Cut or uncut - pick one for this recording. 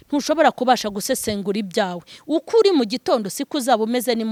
uncut